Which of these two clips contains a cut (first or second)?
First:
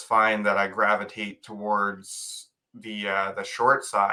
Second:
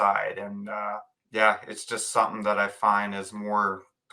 second